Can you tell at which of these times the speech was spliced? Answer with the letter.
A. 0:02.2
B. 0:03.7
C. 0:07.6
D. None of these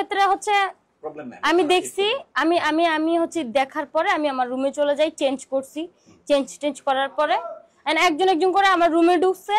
D